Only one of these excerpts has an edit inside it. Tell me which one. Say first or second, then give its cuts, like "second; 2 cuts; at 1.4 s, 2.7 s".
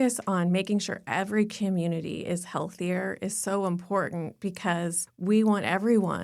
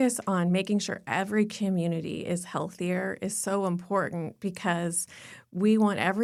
first; 1 cut; at 5.1 s